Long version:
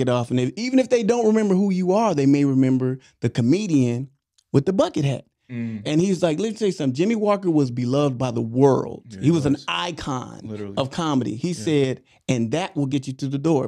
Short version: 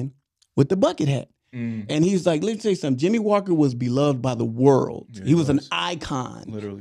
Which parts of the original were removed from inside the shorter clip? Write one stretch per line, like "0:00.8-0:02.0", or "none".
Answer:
none